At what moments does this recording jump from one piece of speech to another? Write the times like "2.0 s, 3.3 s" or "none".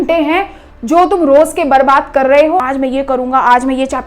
2.6 s